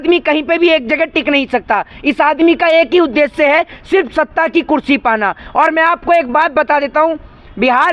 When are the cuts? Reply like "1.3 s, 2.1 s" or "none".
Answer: none